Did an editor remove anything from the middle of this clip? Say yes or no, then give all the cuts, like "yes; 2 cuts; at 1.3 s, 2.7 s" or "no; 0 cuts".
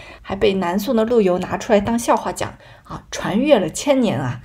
no; 0 cuts